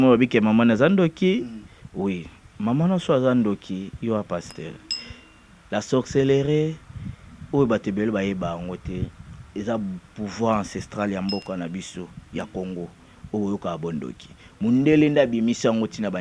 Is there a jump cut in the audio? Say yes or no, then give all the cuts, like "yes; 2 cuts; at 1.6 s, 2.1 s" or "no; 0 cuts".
no; 0 cuts